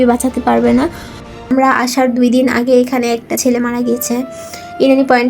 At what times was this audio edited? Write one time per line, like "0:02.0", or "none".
0:01.5